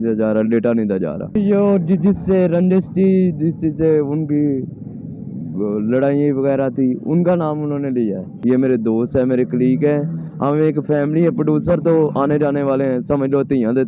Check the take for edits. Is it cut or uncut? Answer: cut